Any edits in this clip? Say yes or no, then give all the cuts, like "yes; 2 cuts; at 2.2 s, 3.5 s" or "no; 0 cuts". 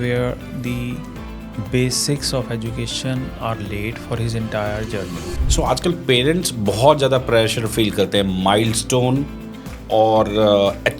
yes; 1 cut; at 5.3 s